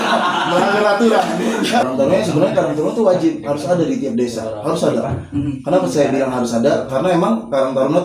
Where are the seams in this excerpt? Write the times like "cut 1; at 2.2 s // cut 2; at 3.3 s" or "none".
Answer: cut 1; at 1.8 s